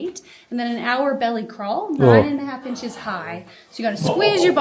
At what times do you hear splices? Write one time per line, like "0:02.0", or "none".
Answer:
none

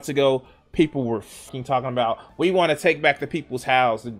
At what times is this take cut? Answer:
0:01.5

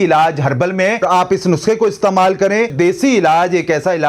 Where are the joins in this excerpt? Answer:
0:01.0
0:02.7

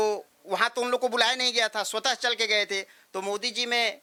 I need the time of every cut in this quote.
none

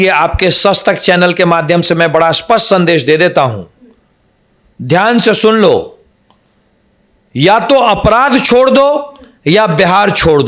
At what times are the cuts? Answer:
none

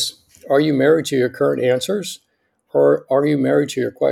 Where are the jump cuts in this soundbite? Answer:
none

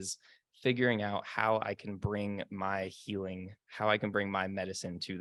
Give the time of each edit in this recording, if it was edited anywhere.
none

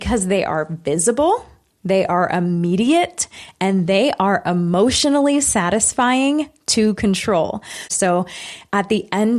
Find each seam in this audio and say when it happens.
0:07.9

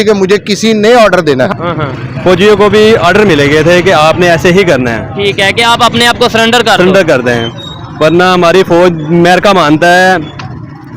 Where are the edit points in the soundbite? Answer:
0:01.5

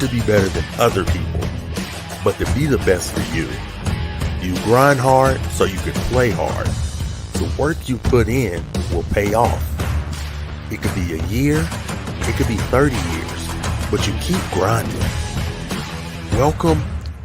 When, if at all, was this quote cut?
0:16.2

